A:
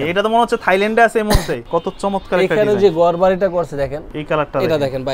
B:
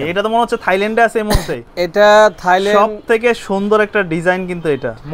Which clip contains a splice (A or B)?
A